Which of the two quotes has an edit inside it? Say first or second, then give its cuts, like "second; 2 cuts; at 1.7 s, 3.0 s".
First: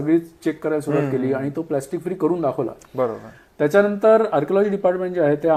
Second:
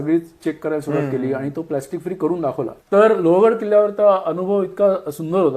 second; 1 cut; at 2.8 s